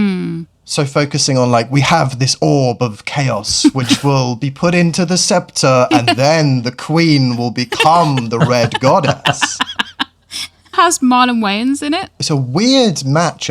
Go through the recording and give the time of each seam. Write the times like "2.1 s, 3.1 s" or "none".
10.7 s, 12.1 s